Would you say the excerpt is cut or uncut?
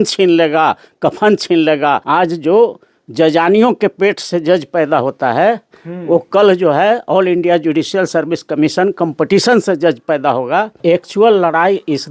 cut